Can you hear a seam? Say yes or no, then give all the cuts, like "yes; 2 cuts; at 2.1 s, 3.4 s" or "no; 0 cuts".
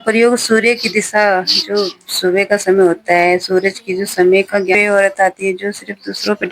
yes; 1 cut; at 4.8 s